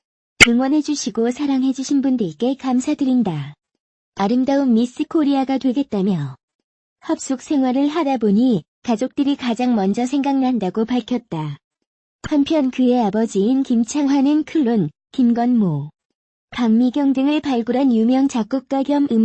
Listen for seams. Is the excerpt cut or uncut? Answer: uncut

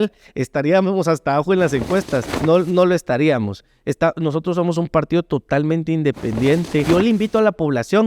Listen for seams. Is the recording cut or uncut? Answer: cut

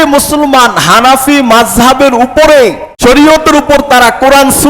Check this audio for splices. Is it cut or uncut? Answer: cut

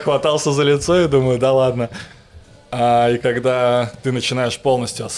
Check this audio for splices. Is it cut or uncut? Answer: uncut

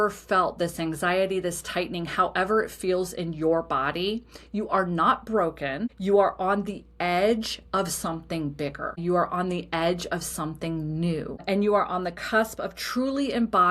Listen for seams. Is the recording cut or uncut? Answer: cut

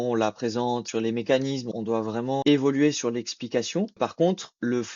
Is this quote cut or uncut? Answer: cut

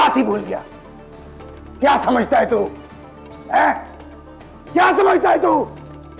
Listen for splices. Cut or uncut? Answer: uncut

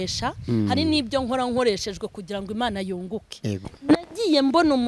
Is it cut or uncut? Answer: cut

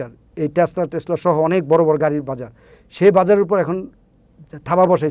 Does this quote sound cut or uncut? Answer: uncut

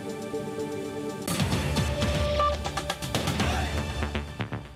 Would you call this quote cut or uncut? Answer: cut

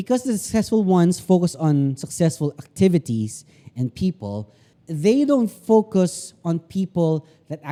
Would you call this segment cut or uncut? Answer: uncut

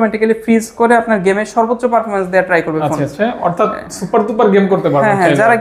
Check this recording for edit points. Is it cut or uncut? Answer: uncut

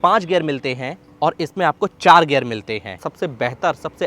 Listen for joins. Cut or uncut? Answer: cut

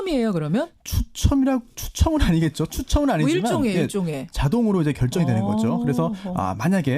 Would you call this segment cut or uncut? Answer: cut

